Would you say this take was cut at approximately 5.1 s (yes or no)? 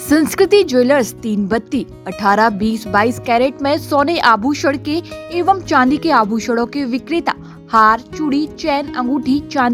no